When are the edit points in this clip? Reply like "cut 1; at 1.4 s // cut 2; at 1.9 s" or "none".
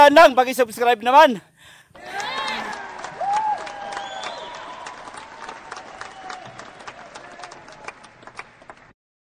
none